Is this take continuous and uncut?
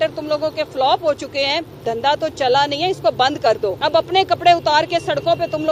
no; 2 cuts; at 1.8 s, 3.8 s

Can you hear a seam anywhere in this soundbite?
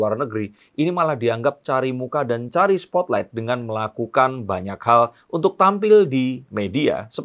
no; 0 cuts

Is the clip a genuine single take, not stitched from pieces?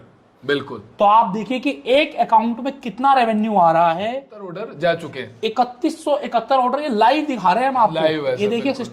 no; 1 cut; at 4.6 s

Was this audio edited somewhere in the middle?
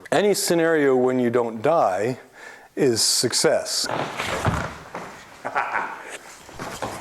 yes; 2 cuts; at 3.8 s, 6.1 s

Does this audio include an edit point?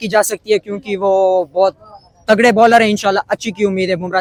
no; 0 cuts

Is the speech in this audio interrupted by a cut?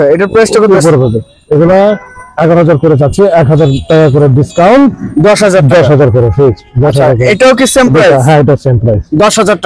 no; 0 cuts

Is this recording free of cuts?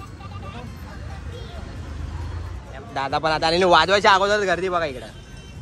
no; 1 cut; at 2.6 s

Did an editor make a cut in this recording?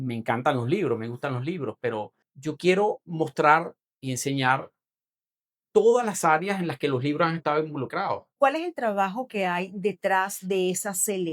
yes; 2 cuts; at 2.2 s, 8.3 s

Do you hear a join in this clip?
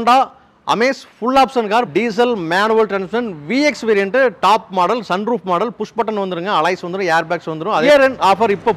yes; 2 cuts; at 1.9 s, 7.8 s

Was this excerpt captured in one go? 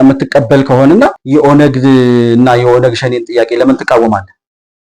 no; 1 cut; at 1.2 s

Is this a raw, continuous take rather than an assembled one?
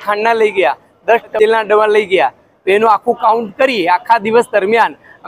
no; 1 cut; at 1.3 s

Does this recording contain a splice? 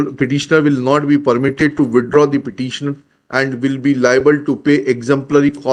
no; 0 cuts

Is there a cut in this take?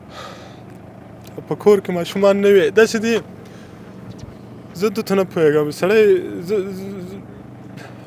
no; 0 cuts

